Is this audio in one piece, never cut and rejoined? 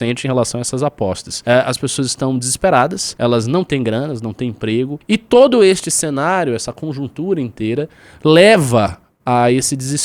no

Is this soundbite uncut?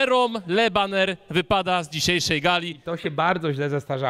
no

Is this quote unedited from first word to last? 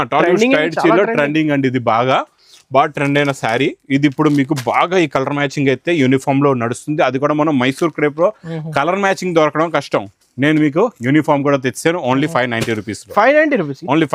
yes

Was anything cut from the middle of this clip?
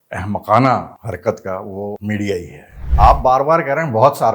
yes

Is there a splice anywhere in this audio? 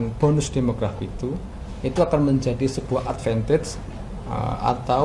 no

